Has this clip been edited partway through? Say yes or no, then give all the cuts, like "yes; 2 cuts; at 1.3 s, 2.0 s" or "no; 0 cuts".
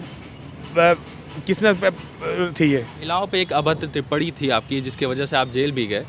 yes; 1 cut; at 3.0 s